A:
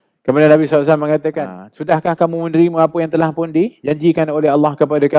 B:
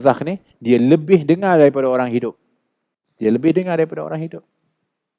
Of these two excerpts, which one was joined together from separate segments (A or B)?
A